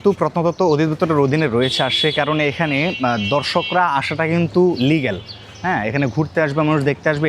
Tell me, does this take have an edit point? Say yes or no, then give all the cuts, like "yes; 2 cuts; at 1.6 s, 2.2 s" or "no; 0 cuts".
no; 0 cuts